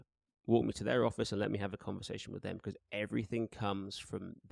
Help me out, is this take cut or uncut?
uncut